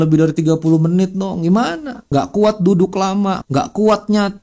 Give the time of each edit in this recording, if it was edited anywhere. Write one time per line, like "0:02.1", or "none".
0:02.0
0:03.4